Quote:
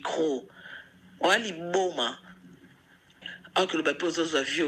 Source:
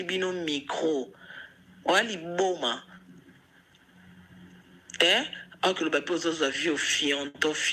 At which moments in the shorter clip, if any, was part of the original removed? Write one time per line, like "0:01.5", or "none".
0:03.3